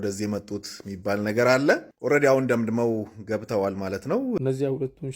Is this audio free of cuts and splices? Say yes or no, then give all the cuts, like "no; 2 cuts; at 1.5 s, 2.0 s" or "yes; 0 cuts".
no; 2 cuts; at 1.9 s, 4.4 s